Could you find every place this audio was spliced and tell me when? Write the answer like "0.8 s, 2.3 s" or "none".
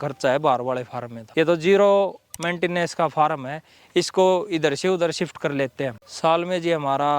6.0 s

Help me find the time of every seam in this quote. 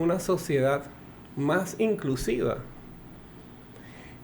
none

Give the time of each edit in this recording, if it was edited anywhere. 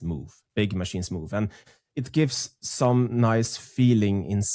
1.6 s

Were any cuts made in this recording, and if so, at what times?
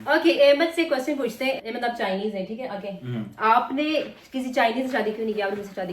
1.6 s

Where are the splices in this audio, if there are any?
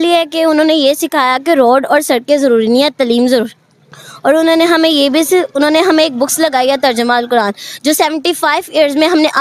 none

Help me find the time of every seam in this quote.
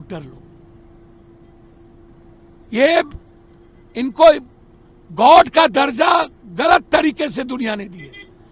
none

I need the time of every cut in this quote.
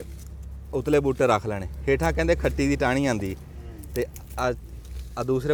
none

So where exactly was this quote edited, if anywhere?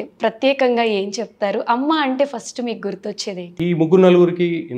3.5 s

